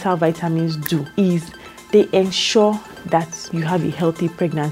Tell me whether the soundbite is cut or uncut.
cut